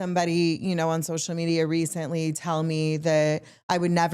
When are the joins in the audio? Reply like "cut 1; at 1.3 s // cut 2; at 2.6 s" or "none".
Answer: none